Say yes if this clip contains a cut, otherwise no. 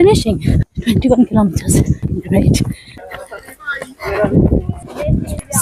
no